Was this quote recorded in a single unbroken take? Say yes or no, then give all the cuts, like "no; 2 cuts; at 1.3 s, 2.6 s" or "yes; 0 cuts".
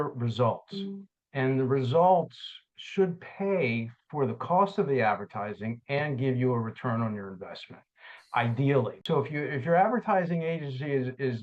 no; 1 cut; at 9.0 s